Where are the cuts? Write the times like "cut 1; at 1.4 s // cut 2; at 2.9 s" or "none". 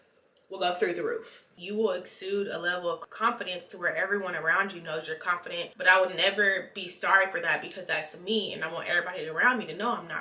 cut 1; at 1.5 s // cut 2; at 5.7 s